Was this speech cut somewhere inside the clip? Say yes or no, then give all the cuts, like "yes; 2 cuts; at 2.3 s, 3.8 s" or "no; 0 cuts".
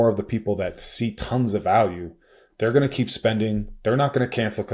no; 0 cuts